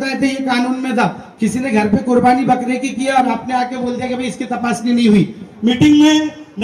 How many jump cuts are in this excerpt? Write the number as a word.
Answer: one